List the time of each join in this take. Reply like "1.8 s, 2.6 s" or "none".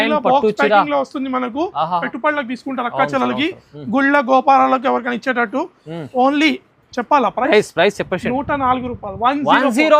2.1 s